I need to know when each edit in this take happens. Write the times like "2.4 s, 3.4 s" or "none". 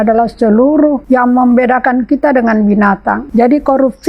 1.0 s, 3.2 s